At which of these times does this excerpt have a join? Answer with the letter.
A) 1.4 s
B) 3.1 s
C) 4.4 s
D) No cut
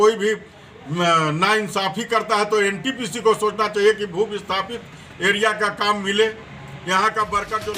D